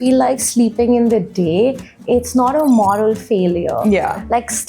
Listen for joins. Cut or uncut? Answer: uncut